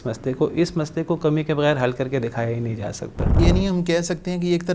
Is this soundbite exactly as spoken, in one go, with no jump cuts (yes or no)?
no